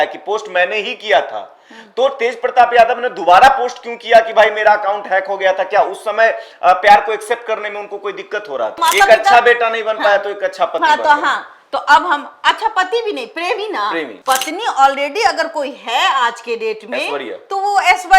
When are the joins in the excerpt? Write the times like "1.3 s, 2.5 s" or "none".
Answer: 8.8 s, 14.1 s